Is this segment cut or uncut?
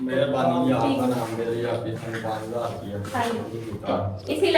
uncut